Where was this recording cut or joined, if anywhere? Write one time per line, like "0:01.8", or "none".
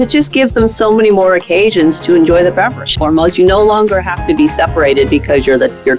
0:02.9

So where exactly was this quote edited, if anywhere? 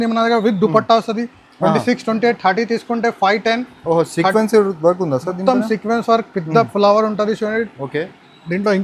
none

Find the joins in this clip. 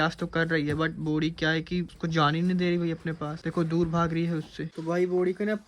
none

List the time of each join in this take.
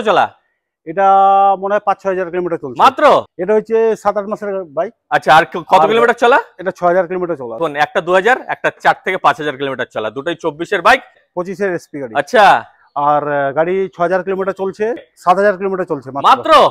0:03.3
0:07.6
0:11.2
0:15.0

